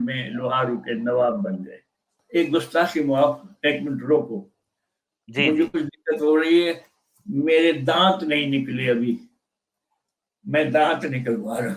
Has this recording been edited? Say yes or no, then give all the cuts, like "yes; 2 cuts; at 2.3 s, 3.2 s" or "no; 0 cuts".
yes; 1 cut; at 2.2 s